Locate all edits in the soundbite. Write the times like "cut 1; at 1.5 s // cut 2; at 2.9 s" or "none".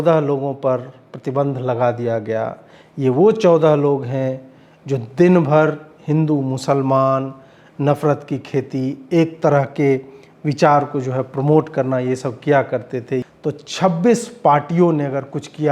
cut 1; at 13.2 s

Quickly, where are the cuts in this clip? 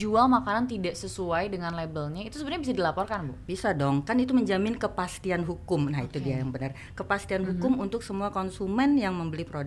none

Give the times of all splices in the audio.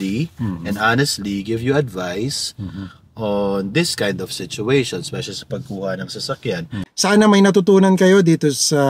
cut 1; at 6.9 s

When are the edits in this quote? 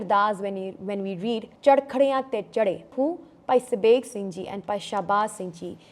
cut 1; at 1.5 s // cut 2; at 2.9 s

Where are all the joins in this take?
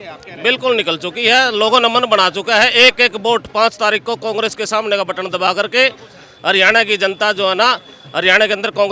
none

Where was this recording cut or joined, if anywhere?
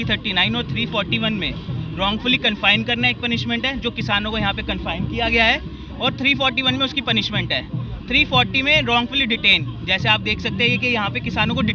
none

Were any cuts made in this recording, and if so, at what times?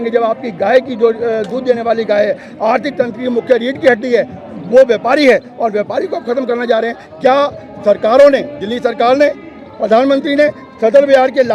none

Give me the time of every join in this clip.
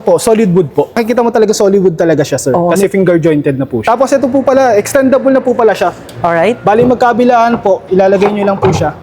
cut 1; at 1.1 s // cut 2; at 3.8 s

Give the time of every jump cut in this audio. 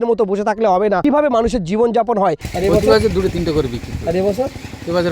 cut 1; at 1.0 s // cut 2; at 2.5 s

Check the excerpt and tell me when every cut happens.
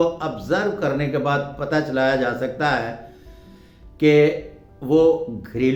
none

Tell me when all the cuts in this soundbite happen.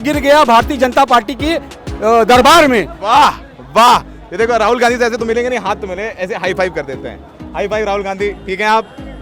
none

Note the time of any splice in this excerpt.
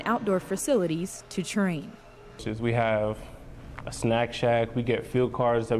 none

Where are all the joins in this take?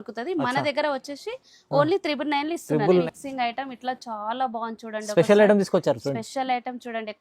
cut 1; at 3.1 s

